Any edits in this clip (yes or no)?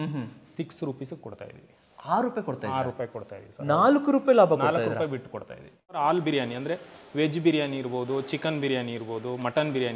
yes